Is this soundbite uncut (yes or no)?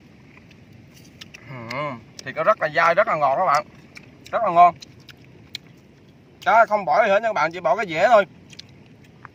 yes